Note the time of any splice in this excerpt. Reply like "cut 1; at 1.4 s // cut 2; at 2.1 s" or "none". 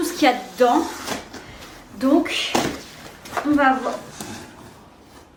none